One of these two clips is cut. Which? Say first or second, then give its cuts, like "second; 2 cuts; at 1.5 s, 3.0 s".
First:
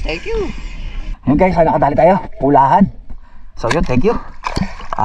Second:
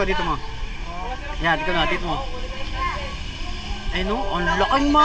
first; 1 cut; at 1.1 s